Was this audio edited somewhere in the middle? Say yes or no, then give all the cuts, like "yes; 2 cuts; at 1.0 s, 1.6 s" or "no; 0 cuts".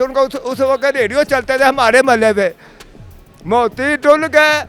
no; 0 cuts